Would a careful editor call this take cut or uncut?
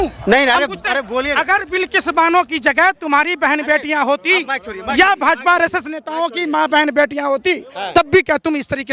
uncut